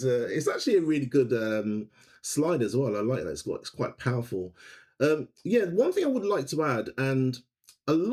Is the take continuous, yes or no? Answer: yes